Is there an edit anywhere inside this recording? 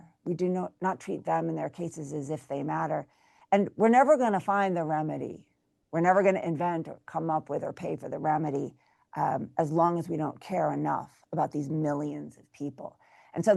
no; 0 cuts

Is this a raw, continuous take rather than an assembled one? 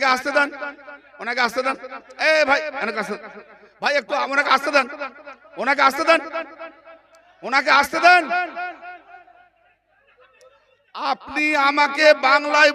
yes; 0 cuts

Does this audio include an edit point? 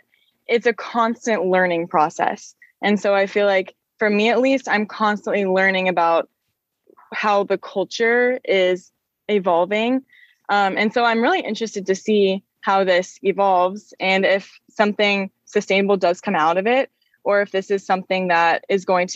no; 0 cuts

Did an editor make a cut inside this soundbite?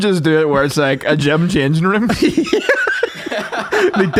no; 0 cuts

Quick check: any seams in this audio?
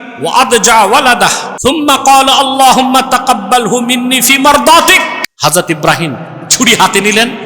yes; 2 cuts; at 1.5 s, 5.2 s

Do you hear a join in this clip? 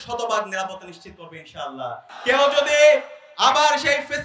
yes; 1 cut; at 2.1 s

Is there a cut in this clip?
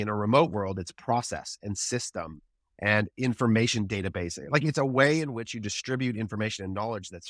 no; 0 cuts

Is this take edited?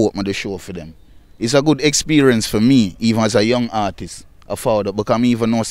yes; 1 cut; at 1.2 s

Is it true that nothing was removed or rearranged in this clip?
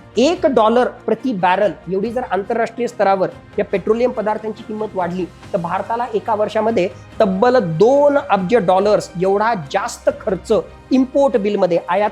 yes; 0 cuts

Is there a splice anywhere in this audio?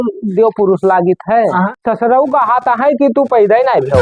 yes; 1 cut; at 1.8 s

